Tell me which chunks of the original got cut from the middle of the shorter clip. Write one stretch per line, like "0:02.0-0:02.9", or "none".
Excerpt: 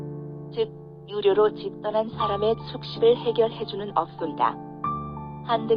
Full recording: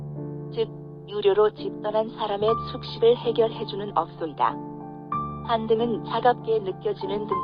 none